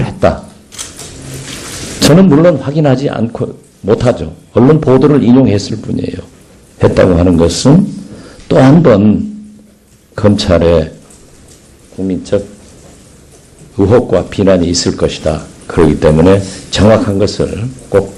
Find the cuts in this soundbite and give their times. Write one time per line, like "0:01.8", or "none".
0:04.0

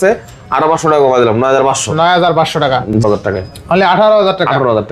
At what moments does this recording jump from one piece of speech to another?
0:03.0

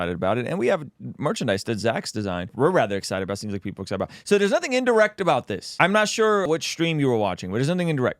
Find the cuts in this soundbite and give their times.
0:02.5
0:05.6
0:06.4

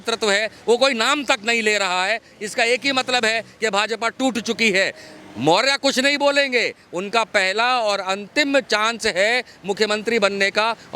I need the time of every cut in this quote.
none

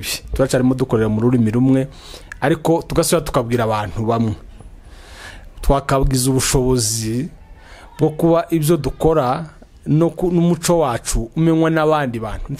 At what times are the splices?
none

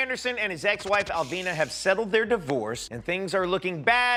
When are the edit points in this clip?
none

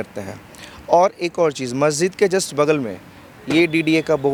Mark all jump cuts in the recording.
none

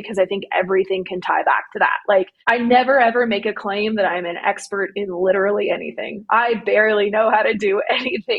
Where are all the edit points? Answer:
0:02.3

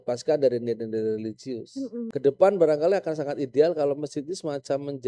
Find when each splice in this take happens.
0:02.1

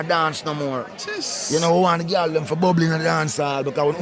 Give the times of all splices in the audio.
none

